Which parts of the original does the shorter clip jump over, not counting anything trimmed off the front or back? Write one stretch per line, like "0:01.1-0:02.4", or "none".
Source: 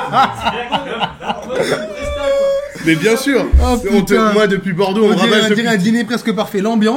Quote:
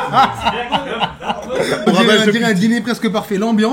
0:01.9-0:05.1